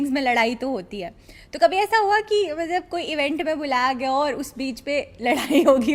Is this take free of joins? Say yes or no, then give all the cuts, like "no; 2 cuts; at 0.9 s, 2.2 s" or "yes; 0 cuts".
yes; 0 cuts